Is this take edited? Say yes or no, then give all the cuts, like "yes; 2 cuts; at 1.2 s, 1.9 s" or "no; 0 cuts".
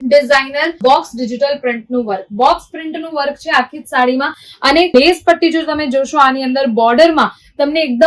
no; 0 cuts